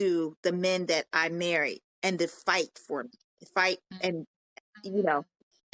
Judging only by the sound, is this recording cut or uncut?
uncut